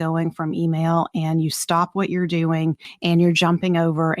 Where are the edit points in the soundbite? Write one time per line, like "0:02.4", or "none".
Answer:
0:02.9